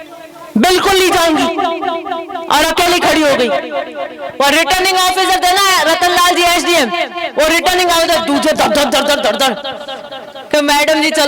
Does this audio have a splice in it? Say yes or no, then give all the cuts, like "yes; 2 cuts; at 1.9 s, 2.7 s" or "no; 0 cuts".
no; 0 cuts